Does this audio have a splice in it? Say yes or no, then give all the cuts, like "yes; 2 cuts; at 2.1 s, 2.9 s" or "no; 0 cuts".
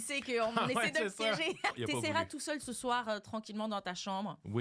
yes; 1 cut; at 1.8 s